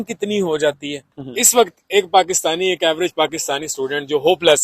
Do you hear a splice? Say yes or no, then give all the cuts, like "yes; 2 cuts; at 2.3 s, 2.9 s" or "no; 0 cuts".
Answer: yes; 1 cut; at 1.0 s